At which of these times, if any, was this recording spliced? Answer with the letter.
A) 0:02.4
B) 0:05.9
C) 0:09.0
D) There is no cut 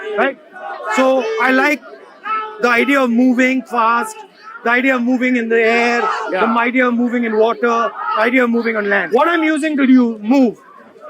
C